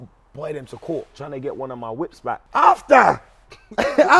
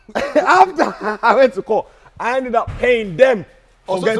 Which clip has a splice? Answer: first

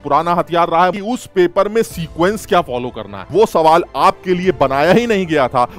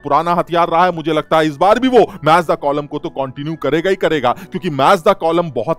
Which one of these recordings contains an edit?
first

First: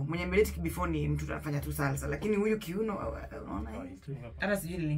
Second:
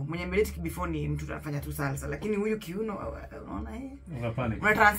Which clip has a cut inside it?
first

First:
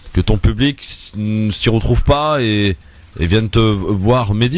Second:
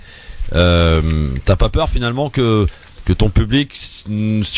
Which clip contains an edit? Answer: first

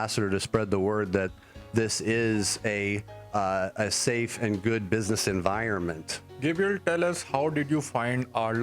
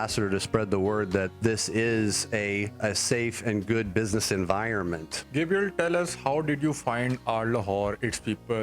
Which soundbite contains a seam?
second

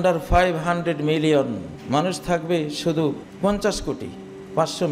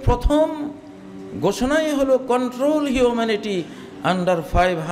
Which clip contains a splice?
first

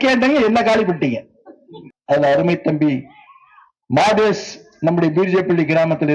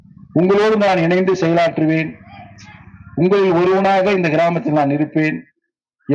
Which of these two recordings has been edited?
first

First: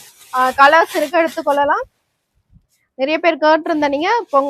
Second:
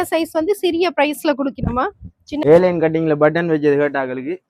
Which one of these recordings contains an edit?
second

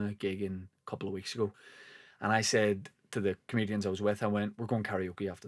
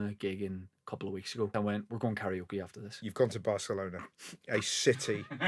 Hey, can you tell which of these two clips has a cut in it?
second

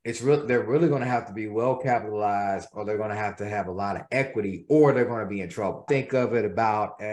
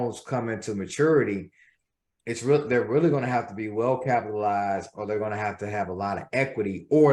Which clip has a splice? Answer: first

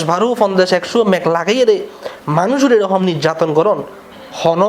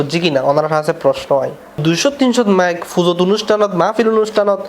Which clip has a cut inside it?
second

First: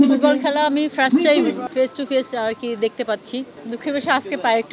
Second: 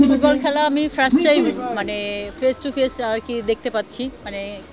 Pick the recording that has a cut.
first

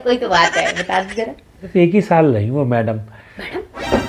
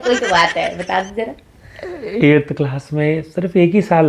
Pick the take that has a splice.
first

